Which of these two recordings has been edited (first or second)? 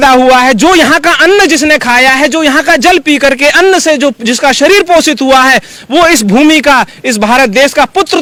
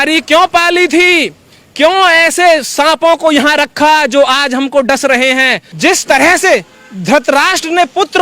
second